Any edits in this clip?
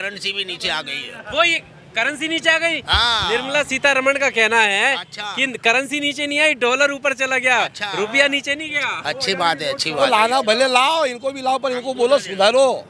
yes; 1 cut; at 10.0 s

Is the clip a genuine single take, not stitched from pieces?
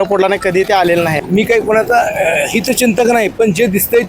no; 1 cut; at 1.2 s

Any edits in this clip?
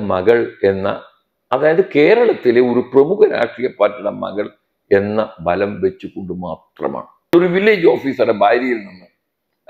yes; 1 cut; at 7.3 s

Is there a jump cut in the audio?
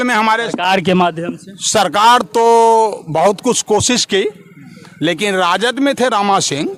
no; 0 cuts

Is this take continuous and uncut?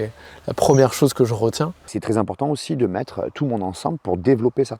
no; 1 cut; at 1.9 s

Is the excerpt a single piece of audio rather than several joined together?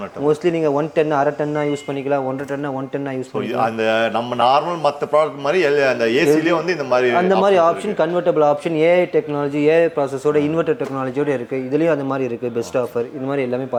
yes; 0 cuts

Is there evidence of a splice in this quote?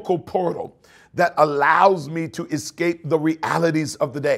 no; 0 cuts

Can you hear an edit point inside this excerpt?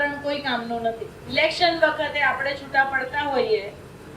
yes; 1 cut; at 1.2 s

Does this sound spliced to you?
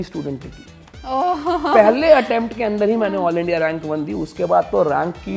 no; 0 cuts

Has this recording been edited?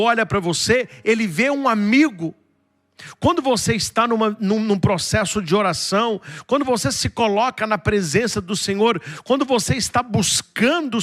no; 0 cuts

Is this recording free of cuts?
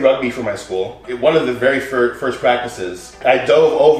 no; 2 cuts; at 1.0 s, 3.2 s

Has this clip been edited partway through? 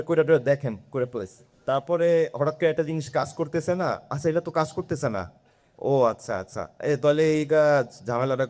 no; 0 cuts

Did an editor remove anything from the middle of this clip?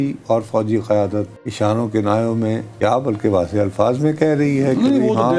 yes; 2 cuts; at 1.4 s, 2.7 s

